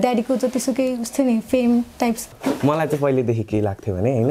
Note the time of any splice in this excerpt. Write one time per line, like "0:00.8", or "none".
0:02.3

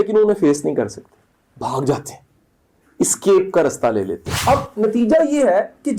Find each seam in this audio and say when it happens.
0:04.2

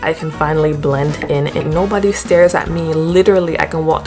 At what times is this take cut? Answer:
0:01.6

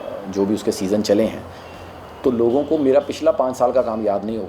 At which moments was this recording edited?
none

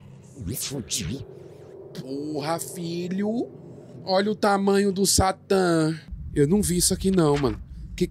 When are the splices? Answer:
0:06.1

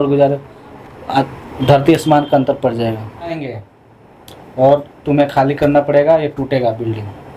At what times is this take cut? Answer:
0:03.4

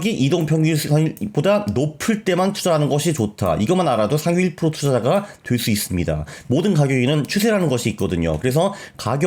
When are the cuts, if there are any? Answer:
none

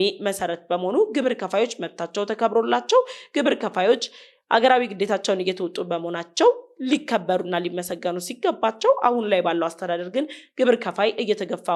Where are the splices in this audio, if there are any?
none

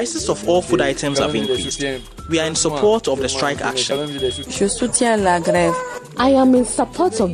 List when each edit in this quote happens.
0:04.4

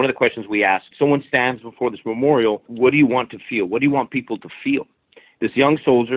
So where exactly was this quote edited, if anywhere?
0:00.9
0:02.7
0:05.2

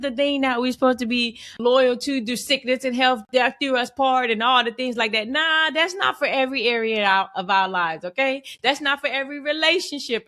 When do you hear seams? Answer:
0:01.6

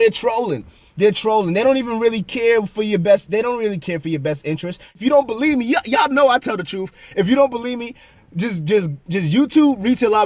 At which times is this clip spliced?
0:04.9

